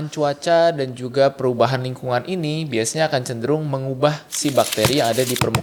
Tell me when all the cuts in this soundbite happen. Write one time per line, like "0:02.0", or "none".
none